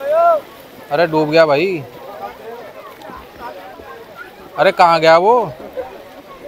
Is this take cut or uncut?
uncut